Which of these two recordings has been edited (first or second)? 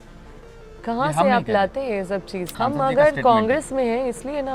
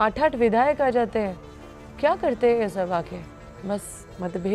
first